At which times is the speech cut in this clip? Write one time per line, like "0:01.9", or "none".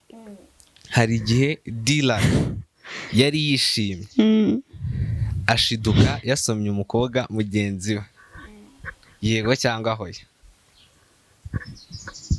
none